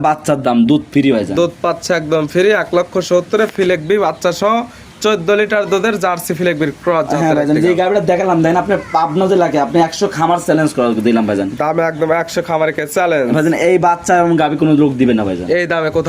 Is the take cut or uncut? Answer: uncut